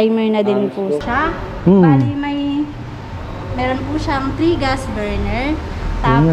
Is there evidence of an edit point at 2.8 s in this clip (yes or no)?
no